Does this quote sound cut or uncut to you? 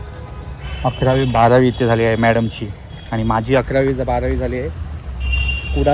uncut